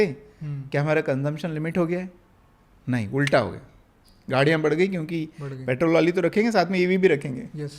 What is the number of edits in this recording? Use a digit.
0